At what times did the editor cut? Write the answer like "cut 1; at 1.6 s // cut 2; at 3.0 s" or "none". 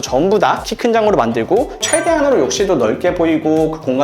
cut 1; at 1.8 s